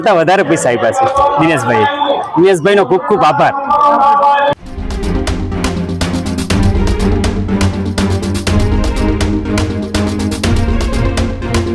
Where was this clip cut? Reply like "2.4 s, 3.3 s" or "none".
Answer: none